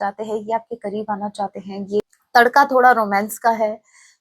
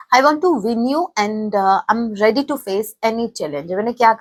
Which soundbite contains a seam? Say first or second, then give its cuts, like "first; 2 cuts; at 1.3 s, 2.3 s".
first; 1 cut; at 2.0 s